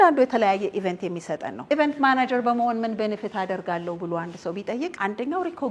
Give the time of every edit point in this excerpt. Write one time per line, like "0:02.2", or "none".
0:01.5
0:05.0